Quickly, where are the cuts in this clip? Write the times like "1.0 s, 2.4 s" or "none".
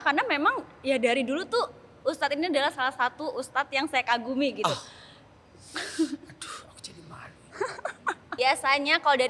8.3 s